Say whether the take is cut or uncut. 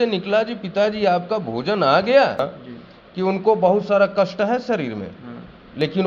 cut